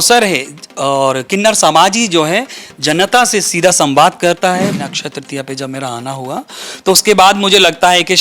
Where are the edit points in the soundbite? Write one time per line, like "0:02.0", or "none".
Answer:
0:04.7